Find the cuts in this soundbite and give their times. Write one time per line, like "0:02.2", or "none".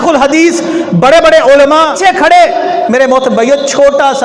0:02.0